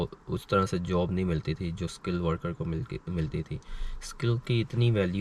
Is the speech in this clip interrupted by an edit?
no; 0 cuts

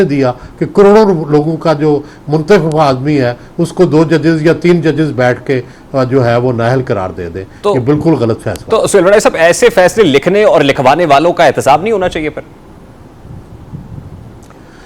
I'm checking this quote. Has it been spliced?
no; 0 cuts

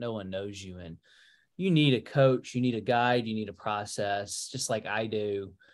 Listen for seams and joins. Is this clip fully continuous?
yes; 0 cuts

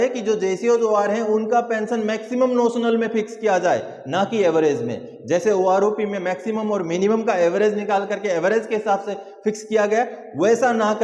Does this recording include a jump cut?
no; 0 cuts

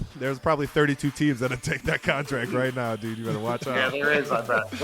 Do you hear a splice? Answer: yes; 1 cut; at 3.8 s

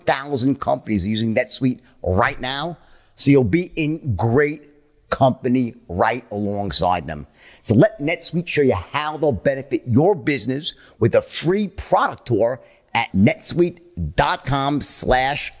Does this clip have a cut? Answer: no; 0 cuts

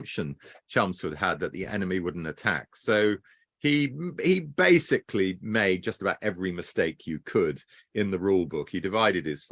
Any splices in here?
no; 0 cuts

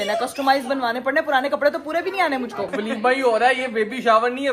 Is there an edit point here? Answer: yes; 1 cut; at 2.7 s

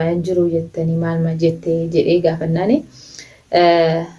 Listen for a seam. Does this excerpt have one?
no; 0 cuts

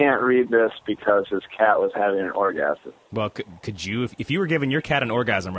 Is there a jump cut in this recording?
no; 0 cuts

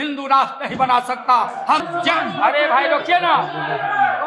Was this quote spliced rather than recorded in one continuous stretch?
yes; 1 cut; at 1.8 s

